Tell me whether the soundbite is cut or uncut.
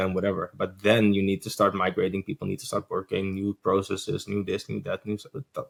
uncut